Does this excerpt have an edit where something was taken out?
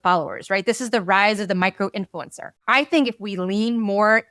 yes; 1 cut; at 2.5 s

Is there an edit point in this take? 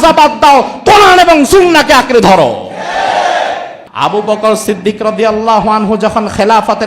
yes; 1 cut; at 3.7 s

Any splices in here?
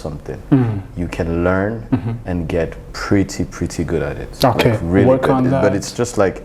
no; 0 cuts

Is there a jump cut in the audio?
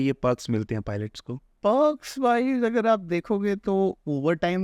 no; 0 cuts

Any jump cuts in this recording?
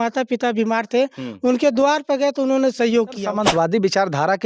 yes; 1 cut; at 3.2 s

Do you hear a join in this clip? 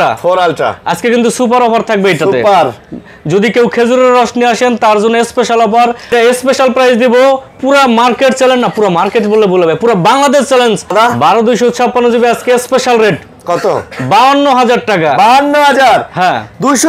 yes; 2 cuts; at 6.1 s, 10.9 s

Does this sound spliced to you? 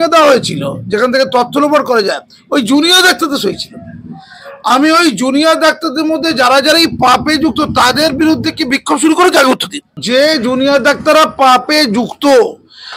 no; 0 cuts

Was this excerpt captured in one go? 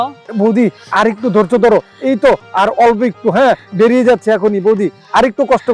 yes; 0 cuts

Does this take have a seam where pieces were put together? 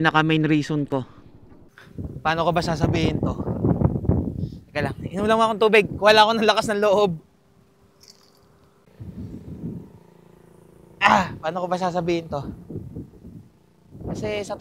yes; 1 cut; at 8.7 s

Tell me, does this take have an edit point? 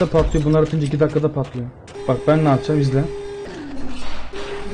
yes; 2 cuts; at 1.8 s, 3.4 s

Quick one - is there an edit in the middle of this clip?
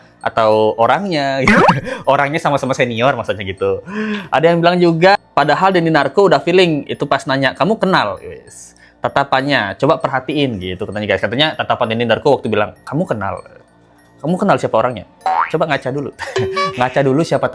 no; 0 cuts

